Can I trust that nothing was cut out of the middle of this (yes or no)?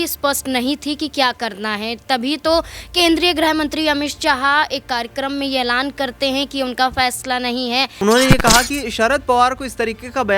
no